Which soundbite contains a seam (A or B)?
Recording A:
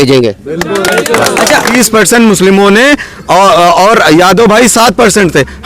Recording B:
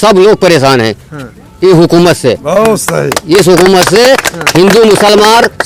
A